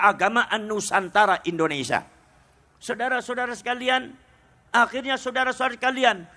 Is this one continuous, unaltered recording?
yes; 0 cuts

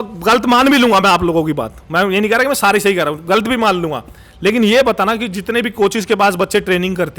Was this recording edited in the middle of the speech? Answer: no; 0 cuts

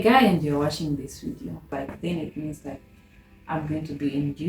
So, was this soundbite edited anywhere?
yes; 1 cut; at 1.7 s

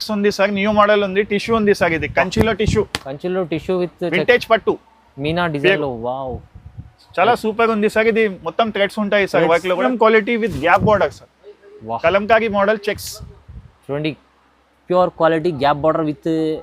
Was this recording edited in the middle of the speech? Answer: yes; 1 cut; at 9.9 s

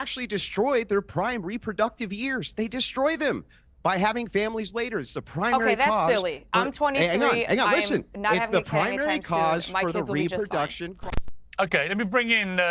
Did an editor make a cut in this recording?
yes; 1 cut; at 11.0 s

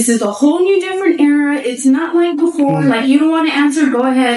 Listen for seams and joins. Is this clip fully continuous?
yes; 0 cuts

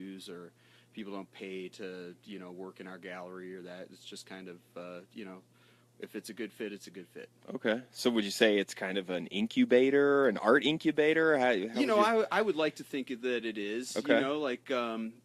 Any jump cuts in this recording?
yes; 1 cut; at 4.9 s

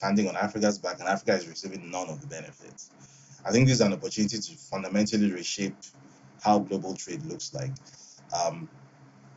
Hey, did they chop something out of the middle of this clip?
no; 0 cuts

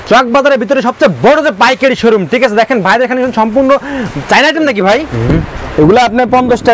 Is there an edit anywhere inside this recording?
yes; 1 cut; at 5.1 s

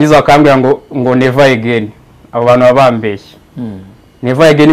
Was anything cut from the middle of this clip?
no; 0 cuts

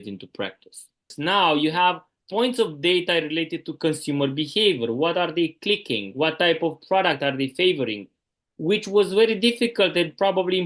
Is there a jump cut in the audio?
yes; 2 cuts; at 1.1 s, 2.1 s

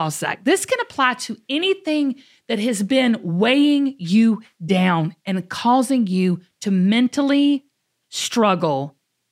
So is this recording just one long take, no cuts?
yes; 0 cuts

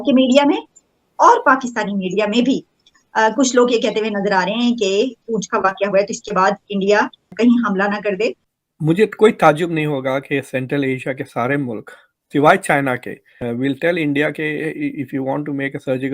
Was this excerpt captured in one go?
no; 1 cut; at 8.5 s

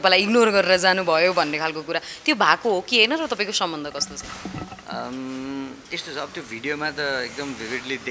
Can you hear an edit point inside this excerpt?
no; 0 cuts

